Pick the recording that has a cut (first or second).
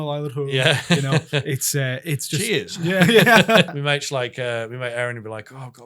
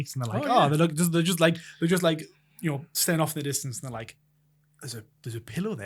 first